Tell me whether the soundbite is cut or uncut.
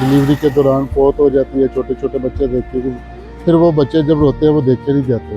uncut